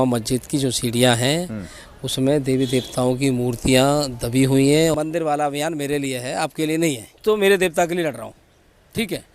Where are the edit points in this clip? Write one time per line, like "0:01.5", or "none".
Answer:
0:04.9
0:07.1